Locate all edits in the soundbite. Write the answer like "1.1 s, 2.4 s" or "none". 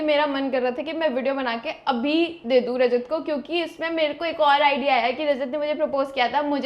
none